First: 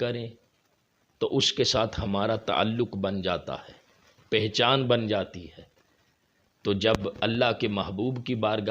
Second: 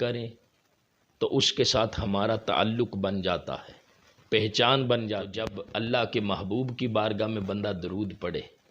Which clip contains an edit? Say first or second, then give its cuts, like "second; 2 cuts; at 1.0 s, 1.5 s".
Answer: second; 1 cut; at 5.6 s